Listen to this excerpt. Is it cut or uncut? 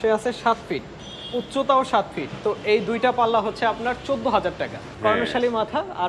cut